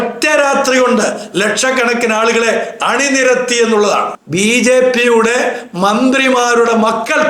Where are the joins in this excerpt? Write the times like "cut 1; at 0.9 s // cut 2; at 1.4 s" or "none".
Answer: cut 1; at 4.2 s